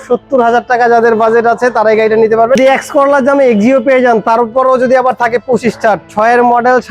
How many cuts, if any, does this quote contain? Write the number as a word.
one